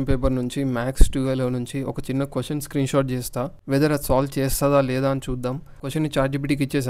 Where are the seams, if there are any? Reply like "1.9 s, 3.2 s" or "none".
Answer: 3.6 s, 5.9 s